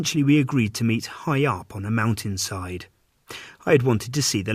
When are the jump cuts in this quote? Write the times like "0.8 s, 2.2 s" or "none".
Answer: 3.0 s